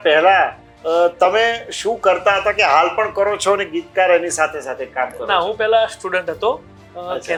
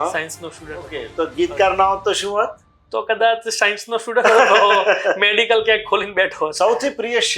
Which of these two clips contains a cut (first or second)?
second